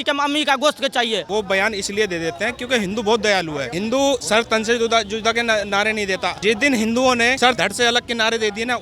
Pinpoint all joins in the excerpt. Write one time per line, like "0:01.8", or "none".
0:01.2
0:04.1
0:06.4
0:07.6

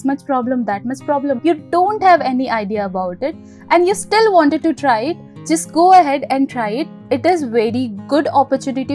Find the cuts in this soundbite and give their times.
0:01.4

